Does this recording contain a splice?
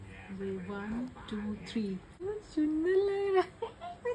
yes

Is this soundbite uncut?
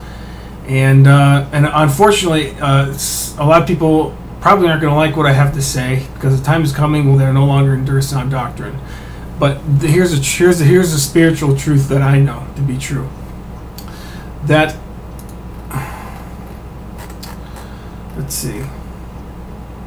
no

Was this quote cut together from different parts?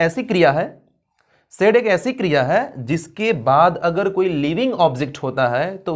no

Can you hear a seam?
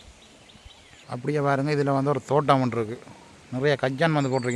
yes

